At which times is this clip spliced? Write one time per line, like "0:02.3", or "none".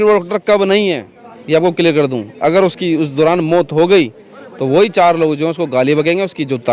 none